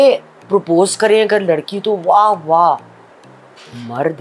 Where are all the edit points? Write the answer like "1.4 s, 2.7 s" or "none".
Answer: none

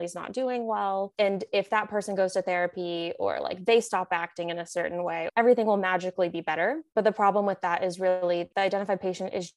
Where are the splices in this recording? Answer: 1.1 s, 5.3 s, 6.8 s, 8.5 s

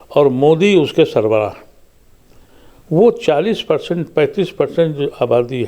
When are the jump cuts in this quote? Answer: none

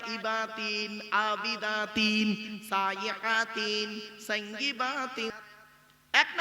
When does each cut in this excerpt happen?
5.3 s

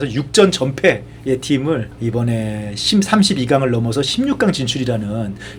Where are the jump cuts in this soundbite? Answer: none

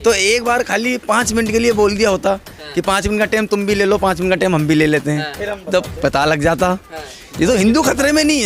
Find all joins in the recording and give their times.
none

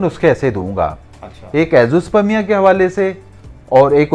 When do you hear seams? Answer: none

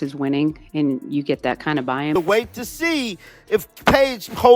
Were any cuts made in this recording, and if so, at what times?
2.1 s

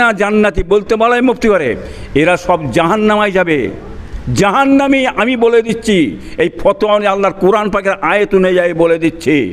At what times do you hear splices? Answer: none

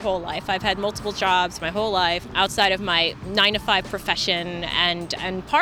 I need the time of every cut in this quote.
2.3 s

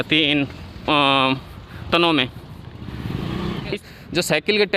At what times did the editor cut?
3.7 s

